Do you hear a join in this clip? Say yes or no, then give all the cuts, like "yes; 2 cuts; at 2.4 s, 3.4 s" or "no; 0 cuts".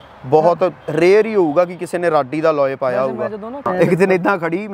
yes; 1 cut; at 3.7 s